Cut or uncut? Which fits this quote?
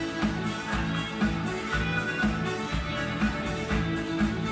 uncut